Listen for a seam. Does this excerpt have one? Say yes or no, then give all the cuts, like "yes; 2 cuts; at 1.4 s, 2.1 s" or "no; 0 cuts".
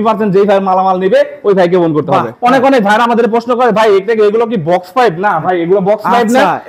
yes; 1 cut; at 2.3 s